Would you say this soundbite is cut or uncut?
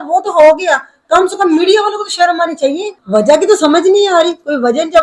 cut